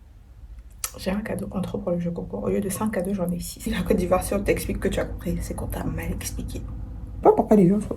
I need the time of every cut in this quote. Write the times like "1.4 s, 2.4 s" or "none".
3.7 s, 7.1 s